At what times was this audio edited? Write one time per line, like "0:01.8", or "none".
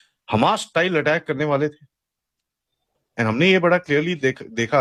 none